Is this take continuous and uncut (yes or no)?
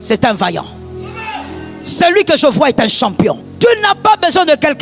no